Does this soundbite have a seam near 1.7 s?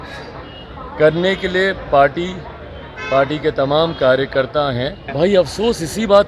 no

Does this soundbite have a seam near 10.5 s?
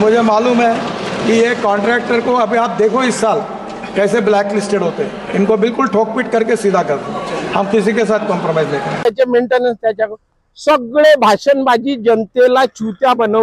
no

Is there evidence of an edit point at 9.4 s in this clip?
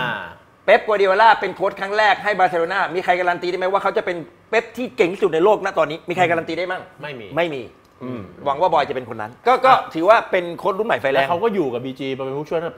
yes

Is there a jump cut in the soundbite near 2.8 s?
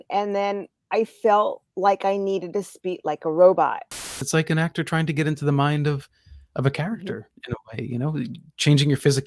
no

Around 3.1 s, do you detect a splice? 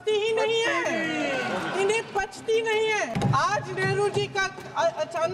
yes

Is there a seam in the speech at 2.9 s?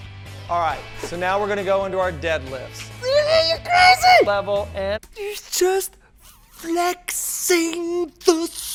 no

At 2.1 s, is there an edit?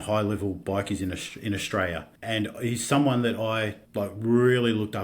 yes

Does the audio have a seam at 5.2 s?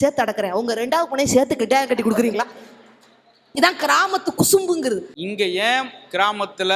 yes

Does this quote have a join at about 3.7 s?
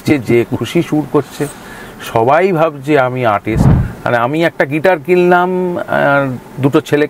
yes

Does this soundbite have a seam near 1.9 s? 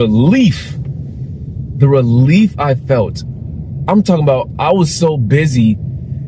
no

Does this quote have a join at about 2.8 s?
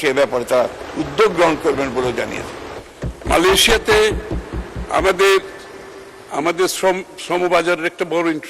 yes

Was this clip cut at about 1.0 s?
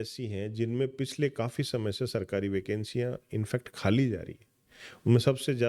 no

